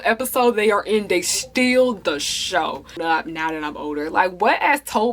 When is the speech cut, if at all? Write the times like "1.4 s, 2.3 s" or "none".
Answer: 3.0 s

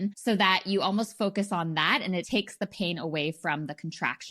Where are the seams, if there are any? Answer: 2.3 s

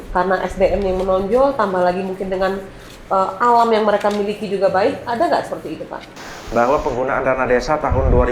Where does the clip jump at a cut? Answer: 6.2 s

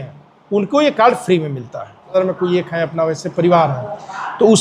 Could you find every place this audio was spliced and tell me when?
2.2 s

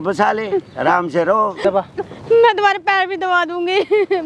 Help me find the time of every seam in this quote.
1.6 s

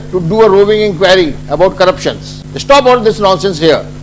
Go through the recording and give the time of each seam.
2.0 s

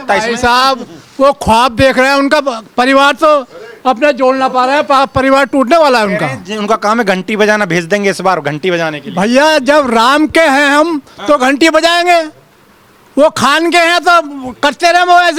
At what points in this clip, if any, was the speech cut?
none

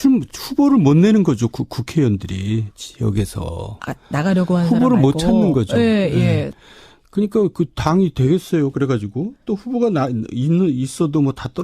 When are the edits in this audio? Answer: 1.3 s

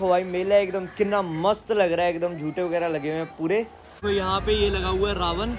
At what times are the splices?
4.0 s

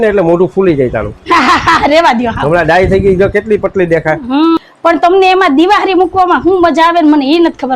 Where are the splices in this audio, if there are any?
4.6 s

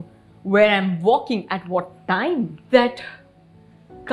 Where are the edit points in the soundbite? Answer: 2.6 s

